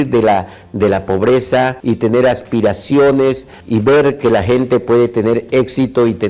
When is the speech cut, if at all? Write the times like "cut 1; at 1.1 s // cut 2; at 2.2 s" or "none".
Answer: cut 1; at 1.8 s // cut 2; at 3.5 s